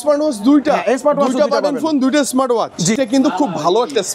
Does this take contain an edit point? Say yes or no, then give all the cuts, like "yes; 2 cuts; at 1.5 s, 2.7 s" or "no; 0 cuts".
yes; 1 cut; at 2.9 s